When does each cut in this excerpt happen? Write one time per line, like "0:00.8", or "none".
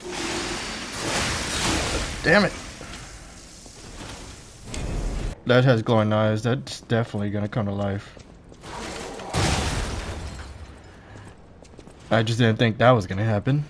0:05.3